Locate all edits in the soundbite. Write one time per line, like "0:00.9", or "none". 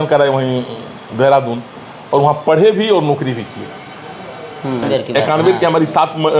0:04.9